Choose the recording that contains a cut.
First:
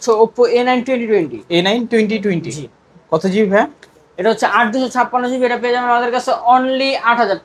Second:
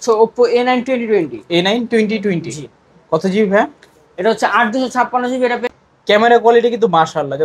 second; 1 cut; at 5.7 s

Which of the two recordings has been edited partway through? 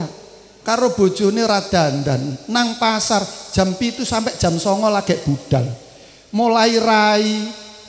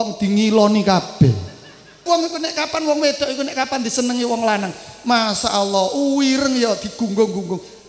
second; 1 cut; at 2.0 s

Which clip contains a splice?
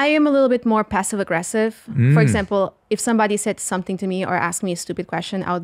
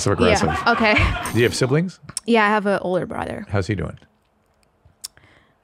second; 1 cut; at 1.3 s

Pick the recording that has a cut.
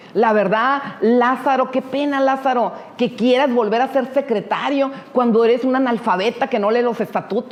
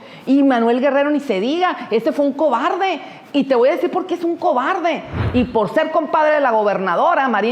second; 1 cut; at 5.2 s

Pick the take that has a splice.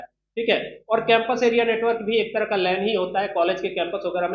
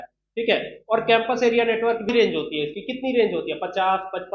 second; 1 cut; at 2.1 s

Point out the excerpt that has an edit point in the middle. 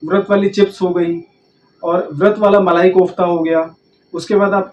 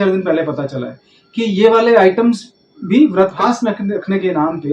second; 1 cut; at 3.4 s

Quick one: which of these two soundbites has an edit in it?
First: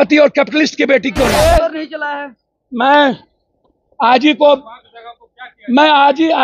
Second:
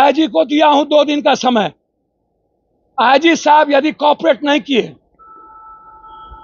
first; 1 cut; at 1.4 s

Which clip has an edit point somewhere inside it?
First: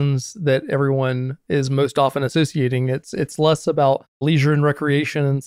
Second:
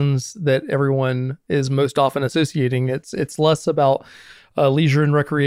first; 1 cut; at 4.2 s

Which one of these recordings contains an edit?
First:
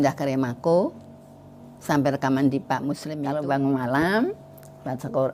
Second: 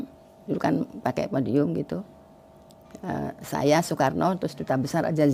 first; 1 cut; at 3.1 s

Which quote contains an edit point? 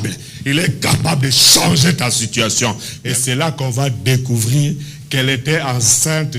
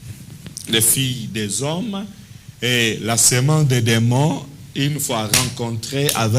first; 1 cut; at 2.9 s

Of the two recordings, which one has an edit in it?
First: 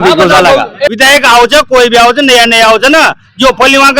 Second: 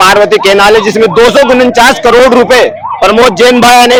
first; 1 cut; at 0.9 s

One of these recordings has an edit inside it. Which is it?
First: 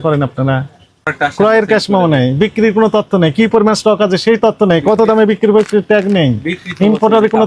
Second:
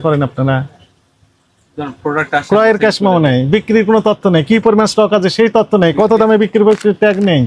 first; 1 cut; at 1.1 s

